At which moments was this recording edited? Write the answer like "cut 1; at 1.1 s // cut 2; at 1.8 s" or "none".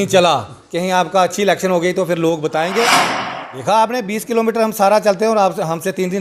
cut 1; at 3.0 s